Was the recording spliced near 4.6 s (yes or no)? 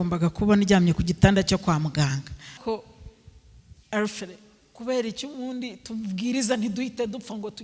no